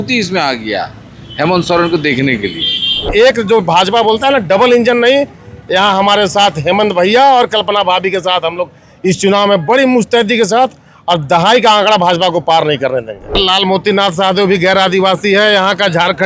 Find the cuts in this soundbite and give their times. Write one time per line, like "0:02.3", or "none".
0:03.0
0:13.3